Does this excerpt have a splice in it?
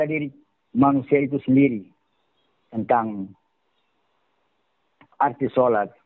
yes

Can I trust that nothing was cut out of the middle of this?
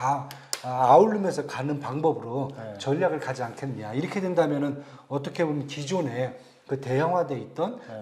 yes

